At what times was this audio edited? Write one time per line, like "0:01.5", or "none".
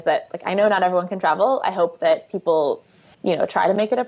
0:03.1